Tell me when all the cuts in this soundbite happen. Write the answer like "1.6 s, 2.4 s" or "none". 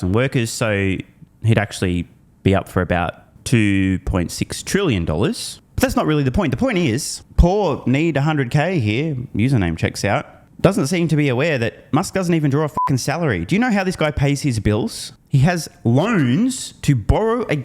none